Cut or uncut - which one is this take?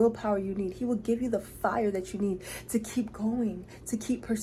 uncut